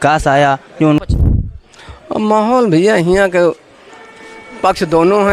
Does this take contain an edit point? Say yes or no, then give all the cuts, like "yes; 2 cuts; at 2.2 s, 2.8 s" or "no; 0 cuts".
yes; 1 cut; at 1.0 s